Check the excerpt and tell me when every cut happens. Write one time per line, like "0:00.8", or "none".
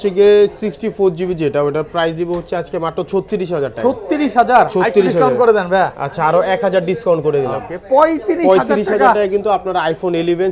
none